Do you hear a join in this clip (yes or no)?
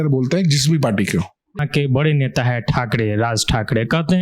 yes